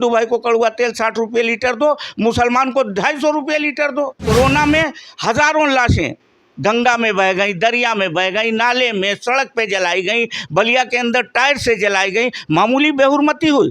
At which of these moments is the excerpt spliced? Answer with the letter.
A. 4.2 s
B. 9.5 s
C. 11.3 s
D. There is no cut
A